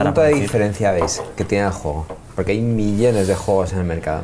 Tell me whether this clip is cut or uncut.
uncut